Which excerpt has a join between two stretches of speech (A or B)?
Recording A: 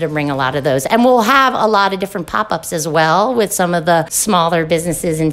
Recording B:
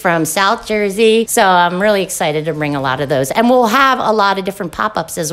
B